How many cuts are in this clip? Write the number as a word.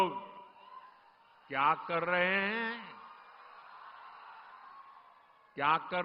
zero